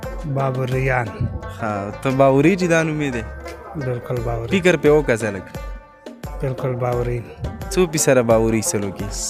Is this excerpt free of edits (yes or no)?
yes